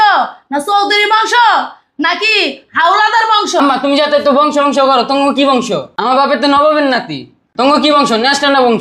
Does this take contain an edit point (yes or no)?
yes